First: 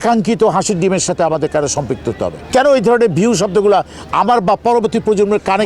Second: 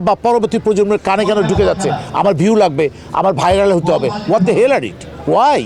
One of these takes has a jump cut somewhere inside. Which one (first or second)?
first